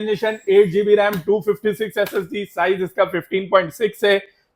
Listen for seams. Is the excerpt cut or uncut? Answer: uncut